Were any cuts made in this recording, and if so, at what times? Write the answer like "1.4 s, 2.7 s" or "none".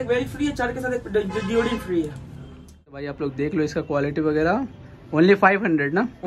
3.0 s